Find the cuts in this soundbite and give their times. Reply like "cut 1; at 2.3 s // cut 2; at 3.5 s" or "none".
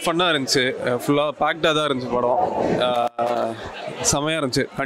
none